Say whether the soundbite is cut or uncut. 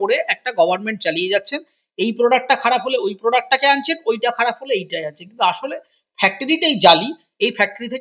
uncut